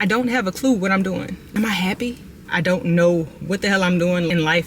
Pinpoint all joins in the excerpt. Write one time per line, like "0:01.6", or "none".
0:01.9